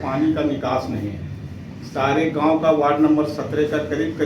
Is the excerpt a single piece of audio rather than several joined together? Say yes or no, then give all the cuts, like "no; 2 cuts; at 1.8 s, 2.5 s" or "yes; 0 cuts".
yes; 0 cuts